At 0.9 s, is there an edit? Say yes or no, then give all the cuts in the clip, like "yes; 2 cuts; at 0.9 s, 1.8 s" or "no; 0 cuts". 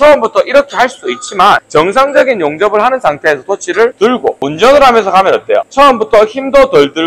no; 2 cuts; at 4.2 s, 5.7 s